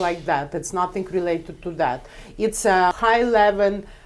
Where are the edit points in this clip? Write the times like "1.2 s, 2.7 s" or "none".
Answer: 2.9 s

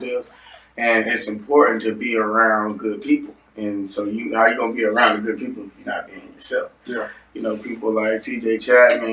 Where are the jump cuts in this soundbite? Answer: none

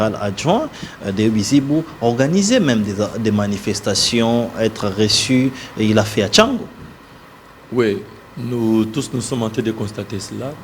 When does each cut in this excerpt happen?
none

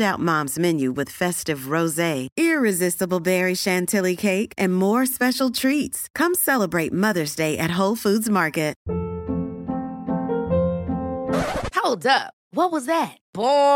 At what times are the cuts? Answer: 8.8 s

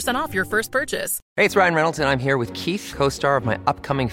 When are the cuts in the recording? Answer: 1.2 s

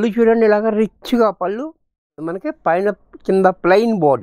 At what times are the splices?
2.3 s

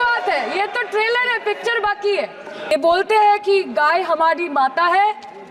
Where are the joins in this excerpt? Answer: 2.7 s

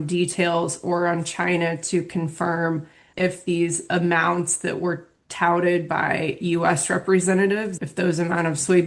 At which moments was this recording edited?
3.0 s, 7.8 s

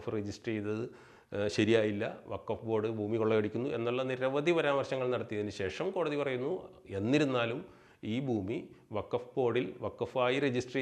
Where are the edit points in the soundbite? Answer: none

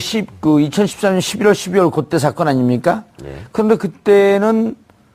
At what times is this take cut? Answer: none

